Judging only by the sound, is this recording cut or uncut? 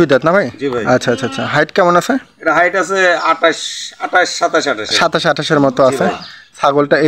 uncut